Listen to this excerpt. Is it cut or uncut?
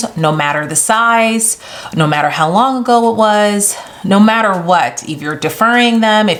uncut